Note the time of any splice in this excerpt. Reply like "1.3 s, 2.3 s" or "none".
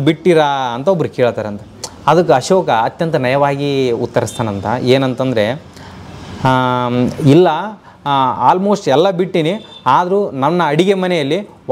none